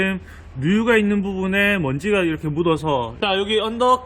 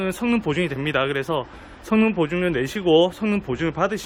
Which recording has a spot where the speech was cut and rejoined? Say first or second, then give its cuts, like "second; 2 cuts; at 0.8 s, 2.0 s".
first; 1 cut; at 3.1 s